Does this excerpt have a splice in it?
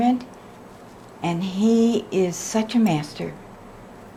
no; 0 cuts

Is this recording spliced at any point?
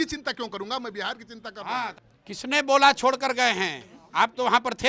yes; 1 cut; at 1.9 s

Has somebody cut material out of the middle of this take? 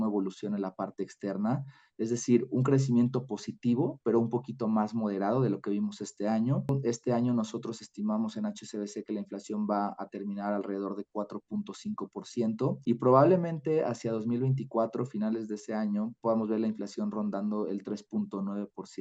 yes; 1 cut; at 6.7 s

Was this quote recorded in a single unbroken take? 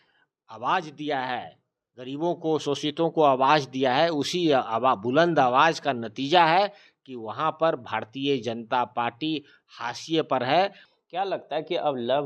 no; 1 cut; at 10.8 s

